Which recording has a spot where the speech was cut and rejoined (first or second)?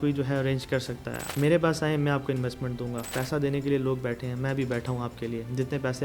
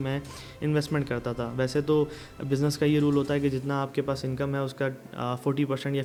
first